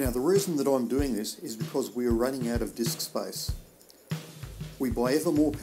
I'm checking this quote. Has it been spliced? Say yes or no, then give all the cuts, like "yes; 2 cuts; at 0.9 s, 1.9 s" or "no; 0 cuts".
yes; 2 cuts; at 3.4 s, 4.8 s